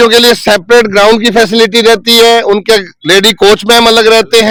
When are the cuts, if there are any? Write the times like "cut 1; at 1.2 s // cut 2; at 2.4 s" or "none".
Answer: none